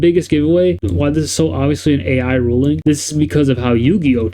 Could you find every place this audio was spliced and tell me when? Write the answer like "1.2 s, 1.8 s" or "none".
0.8 s, 2.8 s